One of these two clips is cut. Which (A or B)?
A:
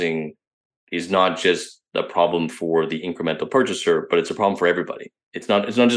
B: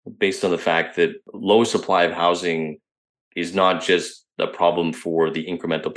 B